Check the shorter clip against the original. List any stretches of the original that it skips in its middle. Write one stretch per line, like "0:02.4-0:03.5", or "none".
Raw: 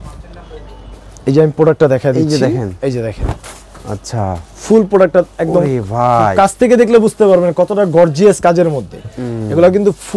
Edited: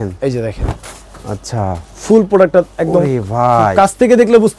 none

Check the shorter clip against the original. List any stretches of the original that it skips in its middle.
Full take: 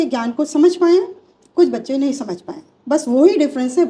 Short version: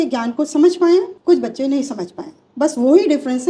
0:01.1-0:01.4

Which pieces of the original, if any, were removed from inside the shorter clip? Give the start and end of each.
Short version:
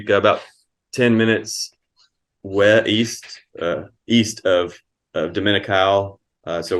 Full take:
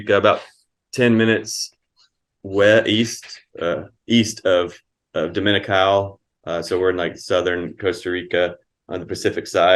none

